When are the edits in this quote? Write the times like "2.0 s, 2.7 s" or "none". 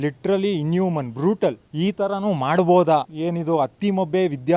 1.7 s, 3.1 s